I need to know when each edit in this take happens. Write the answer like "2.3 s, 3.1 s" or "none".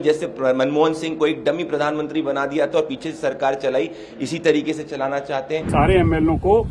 5.7 s